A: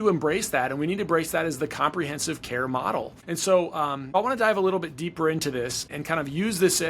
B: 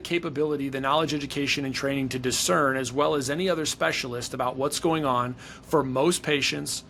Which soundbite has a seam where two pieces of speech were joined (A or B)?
A